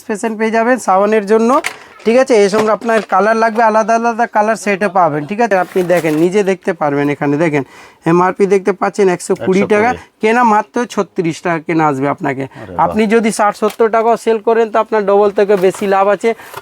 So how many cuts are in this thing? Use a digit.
1